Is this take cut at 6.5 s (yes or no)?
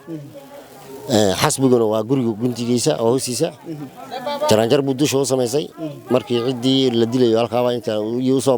no